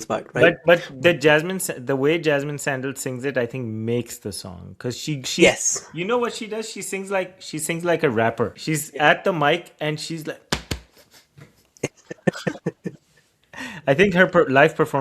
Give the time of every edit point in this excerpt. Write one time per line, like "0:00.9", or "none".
0:08.6